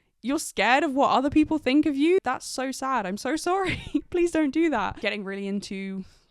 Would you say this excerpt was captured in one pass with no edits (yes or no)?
no